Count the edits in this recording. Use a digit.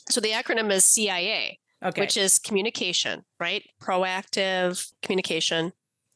1